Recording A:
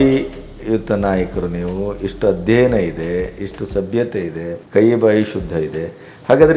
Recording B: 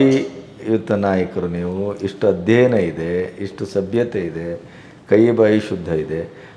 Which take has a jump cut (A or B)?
A